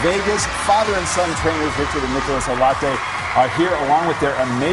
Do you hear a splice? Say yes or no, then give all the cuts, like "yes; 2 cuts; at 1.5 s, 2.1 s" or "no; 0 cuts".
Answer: no; 0 cuts